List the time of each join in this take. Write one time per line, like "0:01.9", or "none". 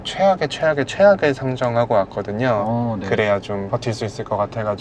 0:03.7